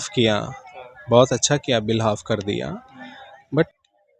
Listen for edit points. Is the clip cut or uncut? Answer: uncut